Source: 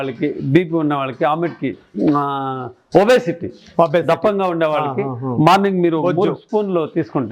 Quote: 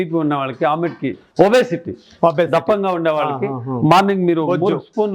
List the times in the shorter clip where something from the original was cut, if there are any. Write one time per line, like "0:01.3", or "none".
0:01.2